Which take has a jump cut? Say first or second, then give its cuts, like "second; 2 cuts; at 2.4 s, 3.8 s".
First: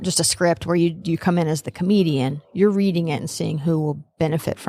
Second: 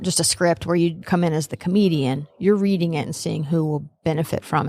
second; 1 cut; at 1.0 s